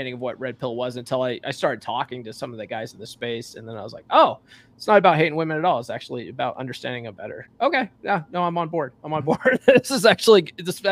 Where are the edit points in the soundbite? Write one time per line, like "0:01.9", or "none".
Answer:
none